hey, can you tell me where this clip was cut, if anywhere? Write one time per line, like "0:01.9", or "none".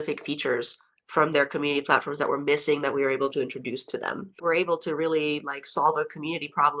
0:04.4